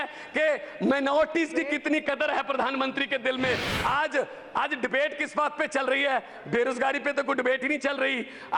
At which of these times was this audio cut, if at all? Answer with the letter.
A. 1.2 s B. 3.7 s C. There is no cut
B